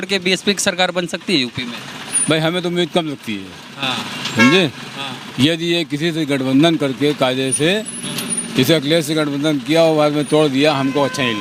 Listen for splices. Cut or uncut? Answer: uncut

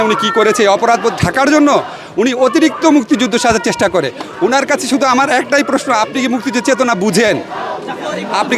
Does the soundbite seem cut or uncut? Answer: uncut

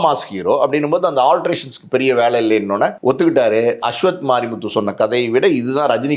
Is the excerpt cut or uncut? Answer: cut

